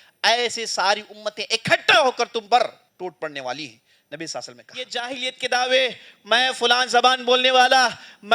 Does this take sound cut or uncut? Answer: cut